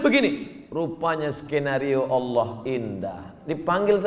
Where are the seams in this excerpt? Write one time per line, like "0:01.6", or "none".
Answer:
none

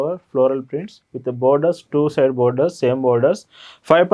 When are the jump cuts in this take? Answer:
none

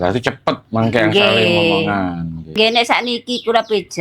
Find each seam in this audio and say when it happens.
0:02.6

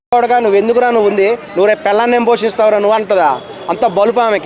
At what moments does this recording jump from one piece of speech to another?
none

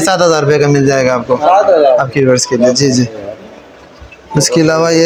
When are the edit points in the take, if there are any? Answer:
none

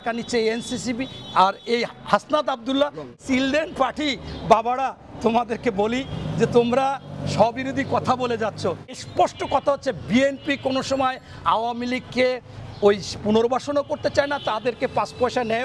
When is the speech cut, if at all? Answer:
0:03.2
0:09.0

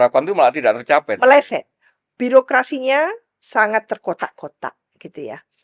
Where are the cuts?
none

